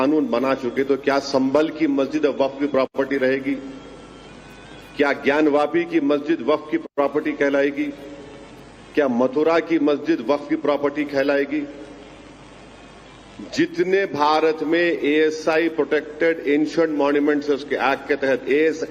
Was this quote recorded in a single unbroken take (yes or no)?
yes